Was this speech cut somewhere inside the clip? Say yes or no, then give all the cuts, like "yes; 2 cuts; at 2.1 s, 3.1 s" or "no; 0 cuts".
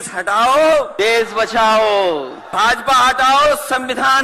yes; 2 cuts; at 0.9 s, 2.4 s